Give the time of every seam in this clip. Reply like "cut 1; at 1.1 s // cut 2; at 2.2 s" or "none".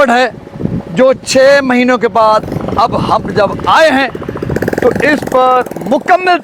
none

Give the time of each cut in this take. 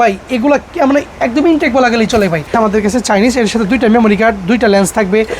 cut 1; at 2.5 s

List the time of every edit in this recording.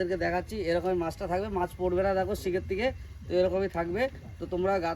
none

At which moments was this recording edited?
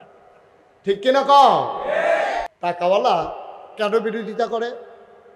cut 1; at 2.4 s

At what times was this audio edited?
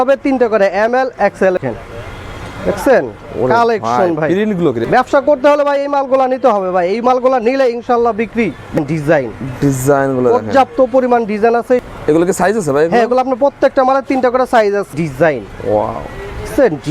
cut 1; at 1.6 s // cut 2; at 4.8 s // cut 3; at 8.7 s // cut 4; at 11.8 s // cut 5; at 14.9 s

